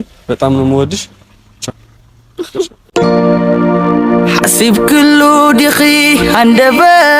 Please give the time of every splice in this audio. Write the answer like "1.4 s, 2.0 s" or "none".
2.8 s